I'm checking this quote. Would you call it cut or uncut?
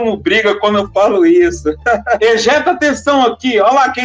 cut